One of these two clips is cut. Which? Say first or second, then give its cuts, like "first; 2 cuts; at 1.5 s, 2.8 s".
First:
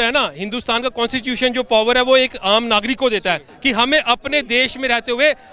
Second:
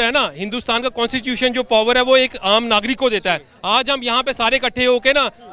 first; 1 cut; at 3.5 s